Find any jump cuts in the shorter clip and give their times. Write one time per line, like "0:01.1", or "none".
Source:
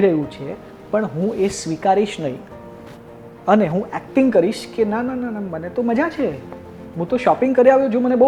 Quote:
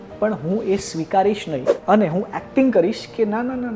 0:01.7